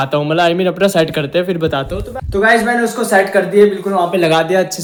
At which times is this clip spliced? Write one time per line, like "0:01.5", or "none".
none